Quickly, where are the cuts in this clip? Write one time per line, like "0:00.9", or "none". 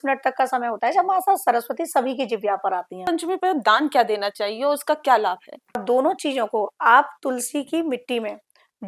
0:03.0
0:05.8